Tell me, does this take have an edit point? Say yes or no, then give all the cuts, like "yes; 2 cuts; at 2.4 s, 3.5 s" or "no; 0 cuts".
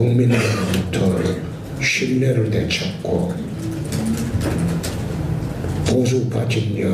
yes; 1 cut; at 3.5 s